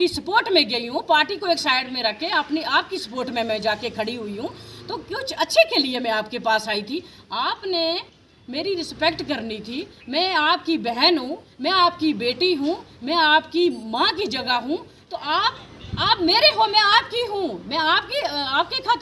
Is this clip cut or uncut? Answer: uncut